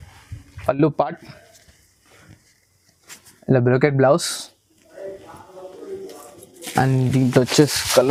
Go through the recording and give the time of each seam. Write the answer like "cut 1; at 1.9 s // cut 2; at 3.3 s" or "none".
none

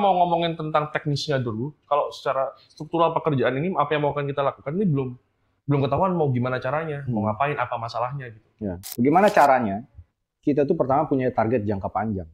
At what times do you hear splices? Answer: cut 1; at 8.8 s

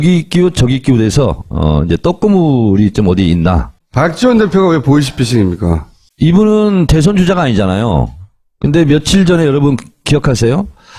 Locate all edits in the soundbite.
none

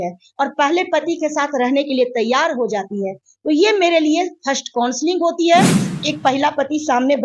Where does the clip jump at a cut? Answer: cut 1; at 5.8 s

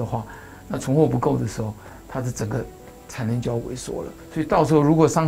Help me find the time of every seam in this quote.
cut 1; at 4.1 s

